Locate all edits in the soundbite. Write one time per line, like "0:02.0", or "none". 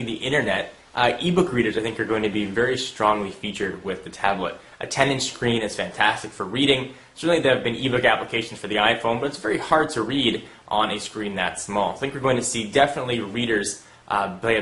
none